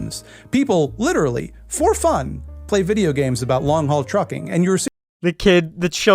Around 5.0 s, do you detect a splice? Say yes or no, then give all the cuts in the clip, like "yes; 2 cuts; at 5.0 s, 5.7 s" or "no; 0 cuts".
yes; 1 cut; at 5.0 s